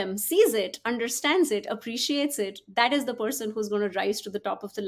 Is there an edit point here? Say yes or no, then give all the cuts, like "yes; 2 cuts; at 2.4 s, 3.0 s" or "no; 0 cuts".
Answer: no; 0 cuts